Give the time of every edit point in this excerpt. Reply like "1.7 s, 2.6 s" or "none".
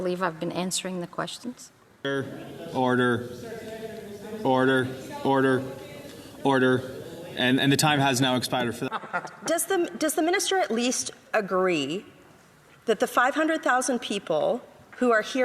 2.1 s, 8.8 s